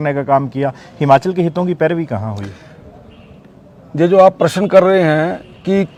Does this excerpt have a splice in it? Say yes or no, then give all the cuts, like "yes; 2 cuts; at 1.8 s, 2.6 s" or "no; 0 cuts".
no; 0 cuts